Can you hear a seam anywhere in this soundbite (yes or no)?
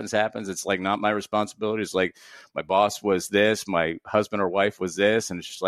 no